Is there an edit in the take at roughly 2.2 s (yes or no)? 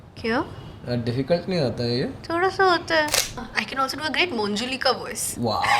no